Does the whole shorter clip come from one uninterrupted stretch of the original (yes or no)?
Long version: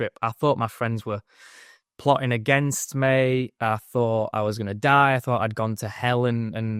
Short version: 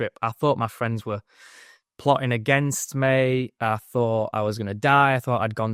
yes